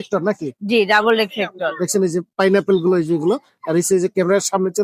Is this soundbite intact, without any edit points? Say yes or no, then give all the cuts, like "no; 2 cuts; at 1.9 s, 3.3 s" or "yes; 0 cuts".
yes; 0 cuts